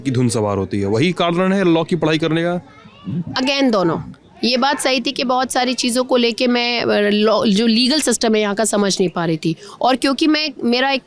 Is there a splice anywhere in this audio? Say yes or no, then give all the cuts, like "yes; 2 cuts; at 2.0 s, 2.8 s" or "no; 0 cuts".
no; 0 cuts